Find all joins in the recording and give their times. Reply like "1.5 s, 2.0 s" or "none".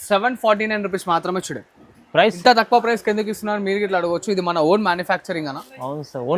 2.4 s